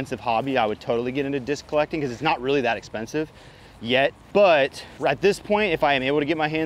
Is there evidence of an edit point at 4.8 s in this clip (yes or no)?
yes